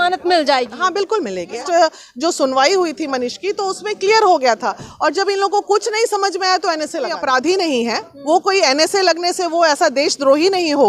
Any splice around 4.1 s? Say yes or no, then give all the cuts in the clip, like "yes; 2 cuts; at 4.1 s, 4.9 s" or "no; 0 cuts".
no; 2 cuts; at 1.6 s, 7.2 s